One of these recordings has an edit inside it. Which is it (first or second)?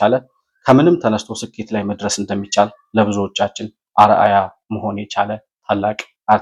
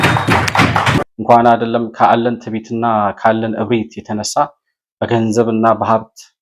second